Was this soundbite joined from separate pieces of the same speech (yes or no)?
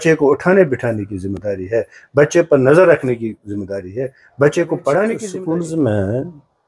yes